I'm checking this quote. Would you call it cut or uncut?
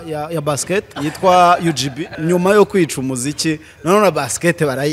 cut